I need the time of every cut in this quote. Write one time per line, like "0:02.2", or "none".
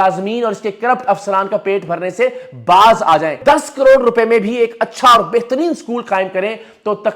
0:03.4